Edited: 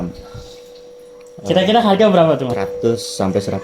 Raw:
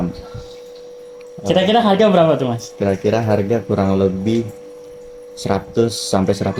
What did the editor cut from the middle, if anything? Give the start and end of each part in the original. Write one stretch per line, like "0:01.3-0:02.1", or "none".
0:02.5-0:05.5